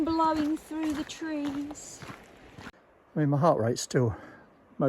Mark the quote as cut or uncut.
cut